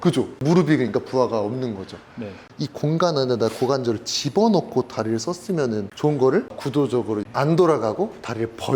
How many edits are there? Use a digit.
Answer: 1